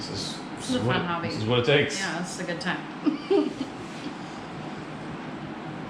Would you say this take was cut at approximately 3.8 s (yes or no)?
no